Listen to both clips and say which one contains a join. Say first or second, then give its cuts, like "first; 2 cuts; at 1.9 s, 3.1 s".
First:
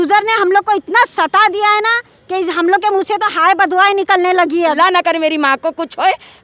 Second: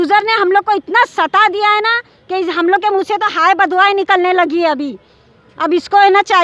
first; 1 cut; at 4.7 s